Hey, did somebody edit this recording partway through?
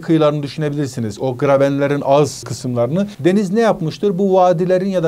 no; 0 cuts

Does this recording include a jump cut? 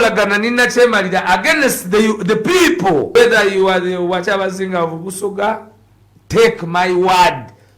yes; 1 cut; at 3.1 s

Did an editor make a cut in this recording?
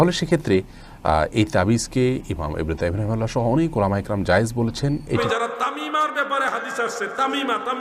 yes; 1 cut; at 5.2 s

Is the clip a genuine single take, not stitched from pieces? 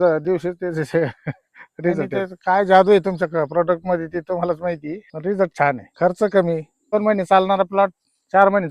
no; 4 cuts; at 2.1 s, 5.1 s, 5.9 s, 6.9 s

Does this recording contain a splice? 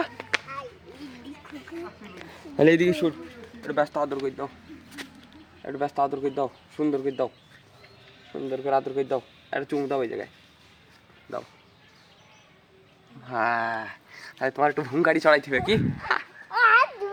no; 0 cuts

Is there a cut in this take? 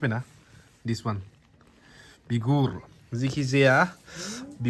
no; 0 cuts

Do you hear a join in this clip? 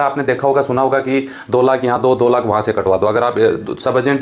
no; 0 cuts

